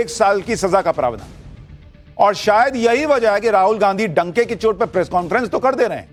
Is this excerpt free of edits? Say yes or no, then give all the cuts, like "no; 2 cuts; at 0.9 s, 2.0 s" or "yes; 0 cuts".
yes; 0 cuts